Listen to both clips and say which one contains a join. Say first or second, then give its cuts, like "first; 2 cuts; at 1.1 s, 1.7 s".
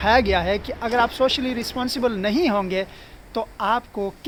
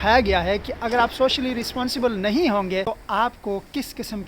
second; 1 cut; at 2.9 s